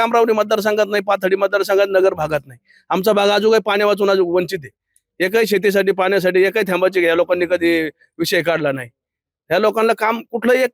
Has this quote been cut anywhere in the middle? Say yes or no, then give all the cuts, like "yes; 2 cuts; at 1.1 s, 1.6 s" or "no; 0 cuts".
no; 0 cuts